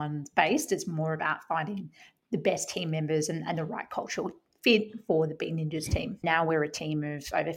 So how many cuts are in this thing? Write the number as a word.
two